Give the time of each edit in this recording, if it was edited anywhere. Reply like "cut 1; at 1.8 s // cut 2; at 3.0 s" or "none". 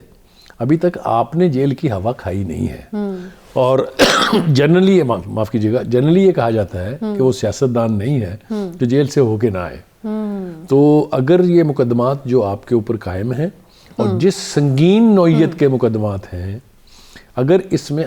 none